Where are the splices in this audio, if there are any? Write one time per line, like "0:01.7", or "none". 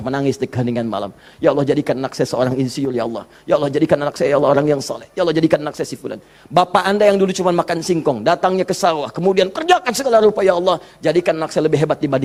none